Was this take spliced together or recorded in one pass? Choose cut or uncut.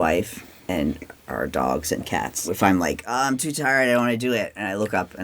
cut